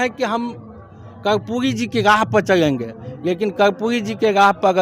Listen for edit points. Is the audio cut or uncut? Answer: uncut